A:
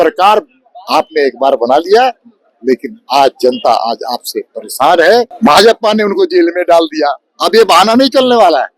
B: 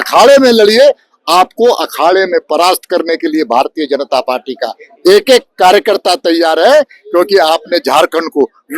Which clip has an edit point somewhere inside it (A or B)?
A